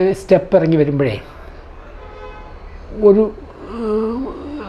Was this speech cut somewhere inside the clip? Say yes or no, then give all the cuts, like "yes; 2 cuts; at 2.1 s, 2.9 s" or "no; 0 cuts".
no; 0 cuts